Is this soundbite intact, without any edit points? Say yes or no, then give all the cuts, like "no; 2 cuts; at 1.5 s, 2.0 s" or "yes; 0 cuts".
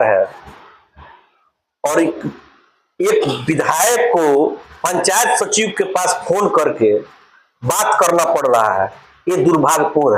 yes; 0 cuts